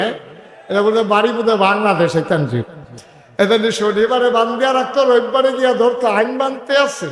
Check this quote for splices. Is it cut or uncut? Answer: uncut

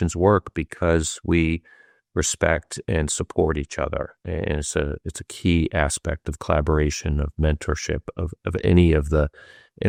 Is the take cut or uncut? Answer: uncut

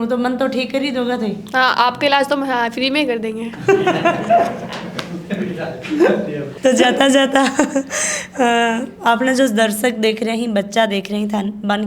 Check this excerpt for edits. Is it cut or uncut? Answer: uncut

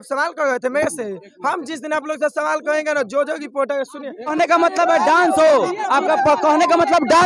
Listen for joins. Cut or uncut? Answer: cut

